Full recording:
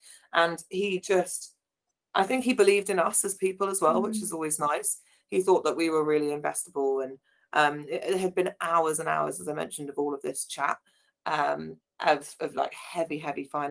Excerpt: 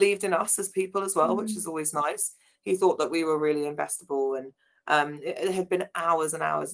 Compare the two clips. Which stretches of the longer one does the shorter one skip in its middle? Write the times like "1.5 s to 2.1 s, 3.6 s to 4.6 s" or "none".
none